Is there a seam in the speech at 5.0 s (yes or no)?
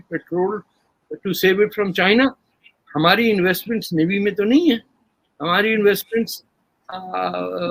no